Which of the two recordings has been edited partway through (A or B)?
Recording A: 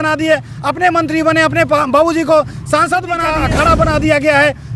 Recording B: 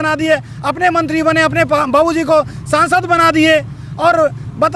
A